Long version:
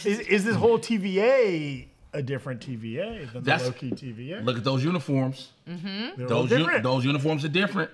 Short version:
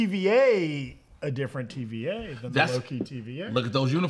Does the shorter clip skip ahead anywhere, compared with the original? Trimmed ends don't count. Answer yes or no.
no